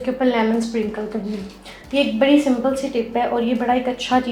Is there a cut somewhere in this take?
no; 0 cuts

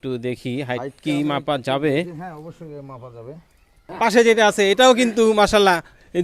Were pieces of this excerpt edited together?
yes; 1 cut; at 3.8 s

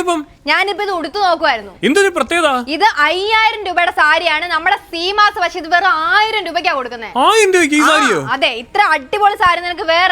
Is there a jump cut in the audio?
no; 0 cuts

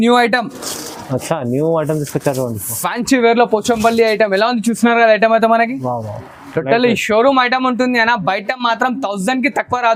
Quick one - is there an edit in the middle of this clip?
no; 0 cuts

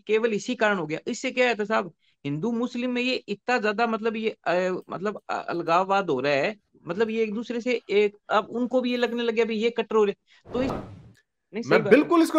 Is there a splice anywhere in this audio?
yes; 1 cut; at 10.8 s

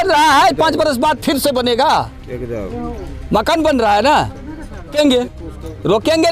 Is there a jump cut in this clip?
yes; 1 cut; at 4.9 s

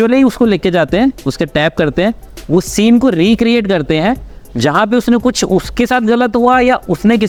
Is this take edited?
no; 0 cuts

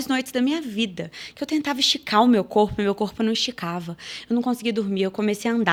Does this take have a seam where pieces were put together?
no; 0 cuts

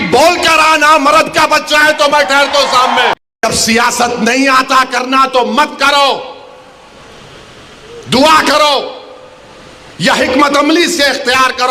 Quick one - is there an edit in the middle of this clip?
yes; 1 cut; at 3.4 s

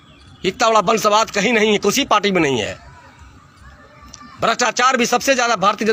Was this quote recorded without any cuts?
yes; 0 cuts

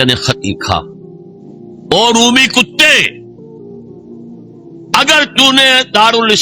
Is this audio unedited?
no; 2 cuts; at 3.2 s, 4.9 s

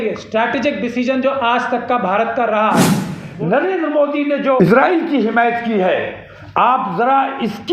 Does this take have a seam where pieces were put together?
yes; 2 cuts; at 3.2 s, 4.6 s

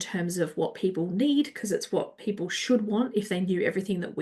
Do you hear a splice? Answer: no; 0 cuts

